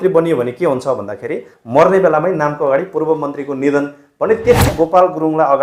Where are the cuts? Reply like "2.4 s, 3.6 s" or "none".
4.6 s